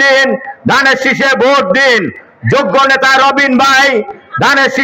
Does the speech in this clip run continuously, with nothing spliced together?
yes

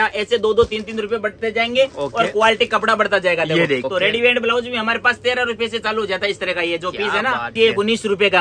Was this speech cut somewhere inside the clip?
yes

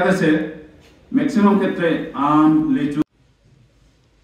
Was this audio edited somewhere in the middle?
yes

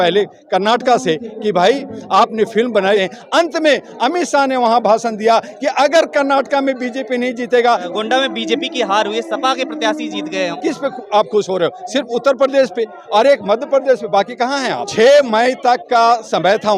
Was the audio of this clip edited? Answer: yes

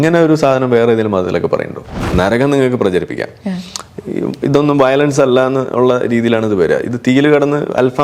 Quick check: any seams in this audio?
yes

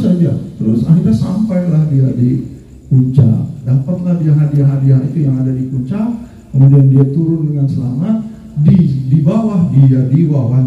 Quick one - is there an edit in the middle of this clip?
no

